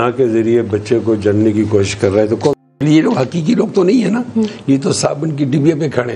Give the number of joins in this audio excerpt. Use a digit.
1